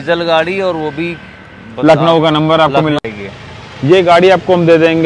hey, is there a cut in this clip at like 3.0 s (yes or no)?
yes